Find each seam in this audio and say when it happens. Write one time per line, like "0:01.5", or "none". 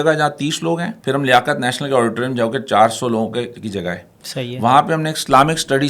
0:00.9